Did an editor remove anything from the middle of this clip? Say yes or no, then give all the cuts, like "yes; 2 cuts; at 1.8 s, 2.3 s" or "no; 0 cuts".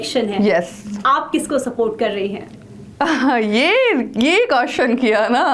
no; 0 cuts